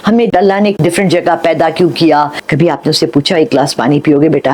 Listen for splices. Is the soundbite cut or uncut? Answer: cut